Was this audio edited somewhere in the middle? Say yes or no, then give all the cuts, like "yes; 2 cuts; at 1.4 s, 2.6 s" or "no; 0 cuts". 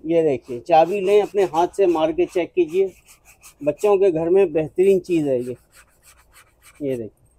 no; 0 cuts